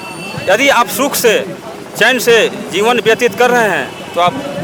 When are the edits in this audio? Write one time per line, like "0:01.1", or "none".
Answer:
none